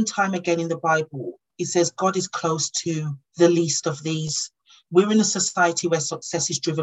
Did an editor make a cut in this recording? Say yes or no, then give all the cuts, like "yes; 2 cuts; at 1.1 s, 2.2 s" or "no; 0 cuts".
no; 0 cuts